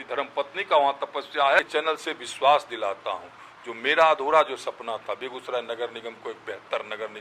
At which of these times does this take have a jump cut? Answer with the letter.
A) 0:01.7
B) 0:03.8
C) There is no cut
A